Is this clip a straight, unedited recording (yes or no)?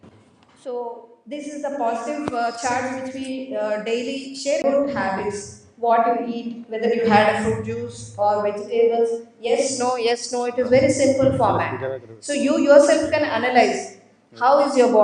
no